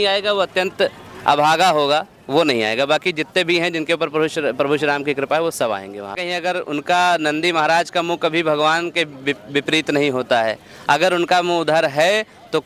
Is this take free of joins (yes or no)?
no